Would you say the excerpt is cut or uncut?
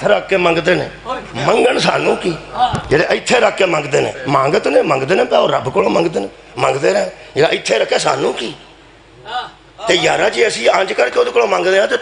uncut